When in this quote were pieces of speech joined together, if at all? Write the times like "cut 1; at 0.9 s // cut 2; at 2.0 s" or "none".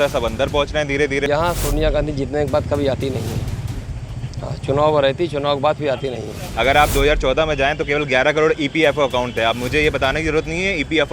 cut 1; at 1.2 s // cut 2; at 6.4 s